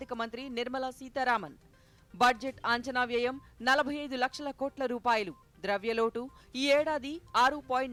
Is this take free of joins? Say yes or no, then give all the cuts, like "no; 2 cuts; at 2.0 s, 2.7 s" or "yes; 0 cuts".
yes; 0 cuts